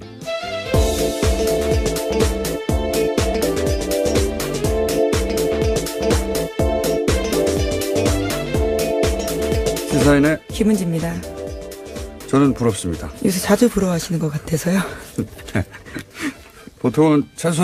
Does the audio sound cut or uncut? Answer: uncut